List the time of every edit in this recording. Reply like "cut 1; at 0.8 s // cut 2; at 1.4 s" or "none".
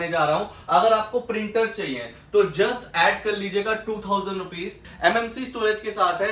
cut 1; at 4.8 s